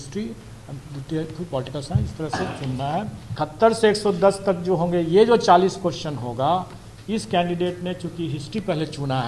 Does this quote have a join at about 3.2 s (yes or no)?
yes